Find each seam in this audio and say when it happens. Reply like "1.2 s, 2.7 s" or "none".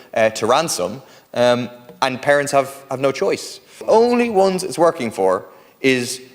3.8 s